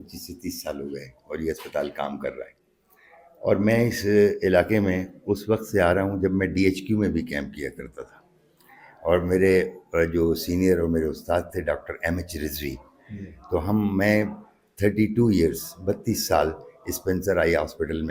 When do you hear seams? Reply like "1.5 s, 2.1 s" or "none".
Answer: none